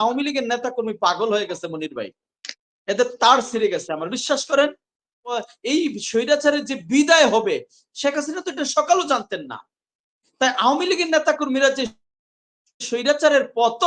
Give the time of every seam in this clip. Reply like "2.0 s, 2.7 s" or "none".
5.4 s